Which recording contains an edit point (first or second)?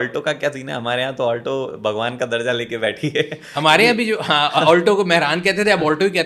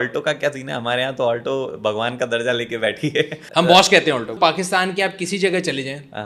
second